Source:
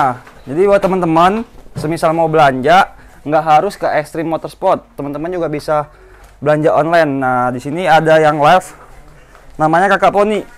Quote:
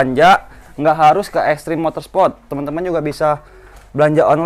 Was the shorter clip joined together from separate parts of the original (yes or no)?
no